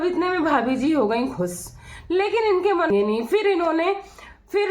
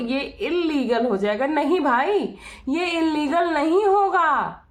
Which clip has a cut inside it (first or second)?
first